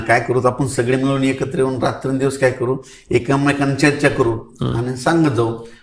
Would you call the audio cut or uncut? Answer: uncut